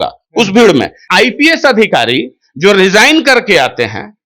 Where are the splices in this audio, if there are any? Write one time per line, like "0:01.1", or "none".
0:01.0

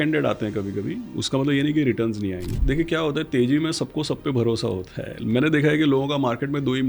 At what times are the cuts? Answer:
0:02.5

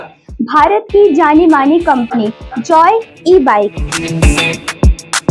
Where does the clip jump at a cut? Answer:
none

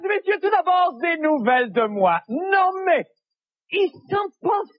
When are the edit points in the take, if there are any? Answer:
none

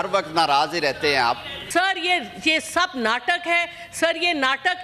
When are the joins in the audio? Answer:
0:01.6

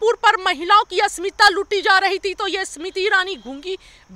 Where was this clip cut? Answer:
none

